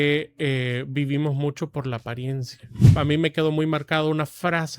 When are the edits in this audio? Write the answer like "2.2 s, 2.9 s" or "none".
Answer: 2.9 s